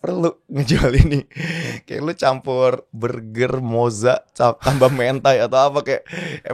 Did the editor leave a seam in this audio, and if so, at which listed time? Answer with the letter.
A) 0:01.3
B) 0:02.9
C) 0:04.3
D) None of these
B